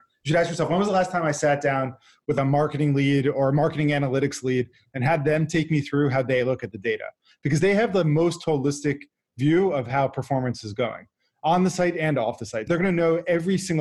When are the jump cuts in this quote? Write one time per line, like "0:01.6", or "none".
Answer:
0:02.3
0:12.7